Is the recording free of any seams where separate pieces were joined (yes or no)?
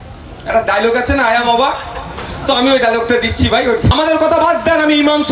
no